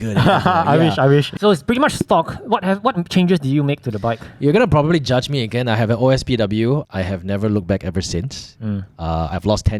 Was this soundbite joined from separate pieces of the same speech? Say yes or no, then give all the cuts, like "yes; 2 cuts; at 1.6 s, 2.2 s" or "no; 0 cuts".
yes; 2 cuts; at 1.3 s, 6.8 s